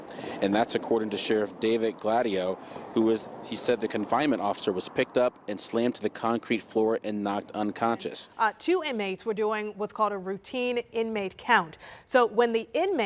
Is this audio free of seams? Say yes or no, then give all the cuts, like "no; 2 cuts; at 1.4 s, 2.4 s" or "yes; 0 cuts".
no; 1 cut; at 8.6 s